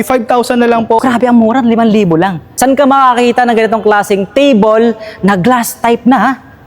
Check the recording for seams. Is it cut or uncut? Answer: cut